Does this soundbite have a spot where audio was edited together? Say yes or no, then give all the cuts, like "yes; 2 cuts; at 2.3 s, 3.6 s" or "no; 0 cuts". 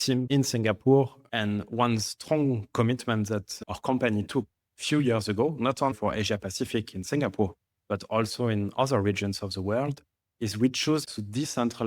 yes; 3 cuts; at 1.2 s, 5.9 s, 11.1 s